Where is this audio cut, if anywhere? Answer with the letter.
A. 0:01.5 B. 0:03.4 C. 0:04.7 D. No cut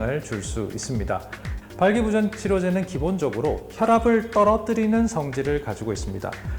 A